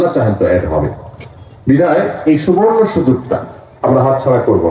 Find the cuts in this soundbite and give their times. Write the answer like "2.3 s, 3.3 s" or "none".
none